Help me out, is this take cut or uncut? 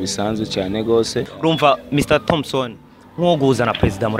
cut